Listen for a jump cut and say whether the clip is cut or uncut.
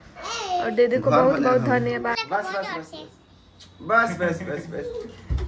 cut